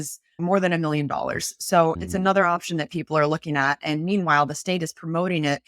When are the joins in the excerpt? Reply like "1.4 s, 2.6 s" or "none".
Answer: 2.0 s